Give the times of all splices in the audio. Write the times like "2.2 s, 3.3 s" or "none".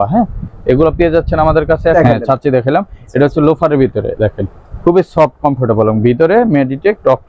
1.9 s